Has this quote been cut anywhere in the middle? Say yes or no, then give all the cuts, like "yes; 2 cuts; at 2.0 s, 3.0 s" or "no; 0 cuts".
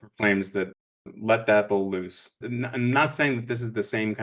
yes; 1 cut; at 2.4 s